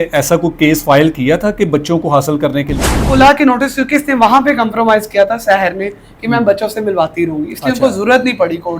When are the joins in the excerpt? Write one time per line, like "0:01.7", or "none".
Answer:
0:03.0